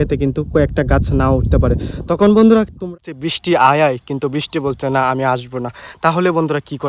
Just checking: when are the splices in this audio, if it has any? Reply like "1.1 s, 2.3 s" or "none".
2.9 s